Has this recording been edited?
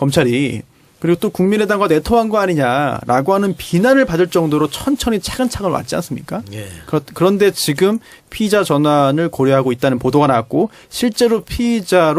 no; 0 cuts

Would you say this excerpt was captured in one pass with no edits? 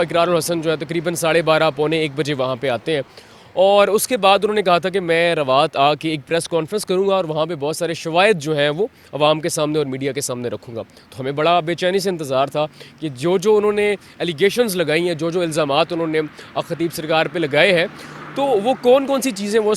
yes; 0 cuts

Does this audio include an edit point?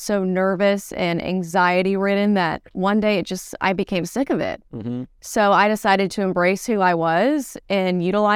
no; 0 cuts

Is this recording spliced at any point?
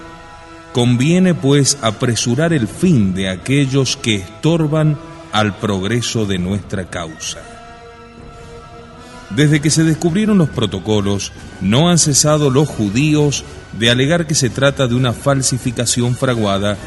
yes; 1 cut; at 10.9 s

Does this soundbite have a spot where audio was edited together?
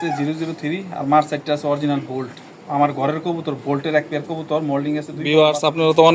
yes; 1 cut; at 5.2 s

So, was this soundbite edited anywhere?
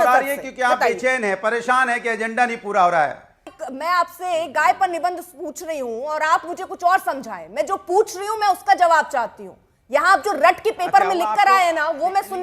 yes; 1 cut; at 3.5 s

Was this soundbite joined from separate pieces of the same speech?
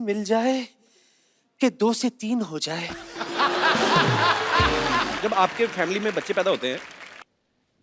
yes; 1 cut; at 5.2 s

